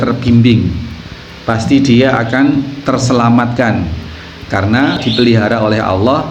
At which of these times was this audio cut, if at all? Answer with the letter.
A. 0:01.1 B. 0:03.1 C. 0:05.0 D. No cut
C